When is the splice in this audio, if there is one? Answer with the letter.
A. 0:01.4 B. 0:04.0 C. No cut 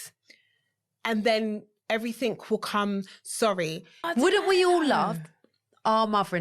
B